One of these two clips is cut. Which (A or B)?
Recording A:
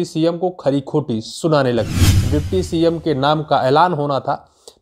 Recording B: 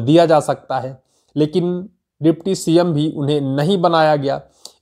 A